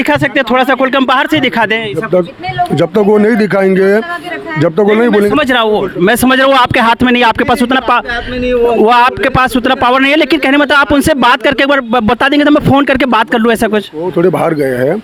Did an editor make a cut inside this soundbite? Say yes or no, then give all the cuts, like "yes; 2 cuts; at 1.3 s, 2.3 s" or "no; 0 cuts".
no; 0 cuts